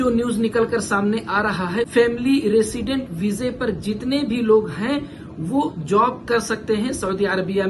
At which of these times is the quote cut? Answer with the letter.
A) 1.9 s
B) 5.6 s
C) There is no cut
A